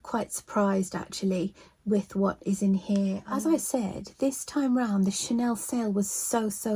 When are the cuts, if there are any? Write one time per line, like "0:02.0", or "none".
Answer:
0:03.2